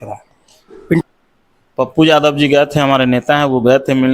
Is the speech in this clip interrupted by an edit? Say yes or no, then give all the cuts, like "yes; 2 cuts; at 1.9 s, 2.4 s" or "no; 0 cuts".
yes; 1 cut; at 1.0 s